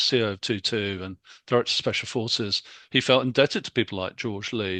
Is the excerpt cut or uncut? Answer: uncut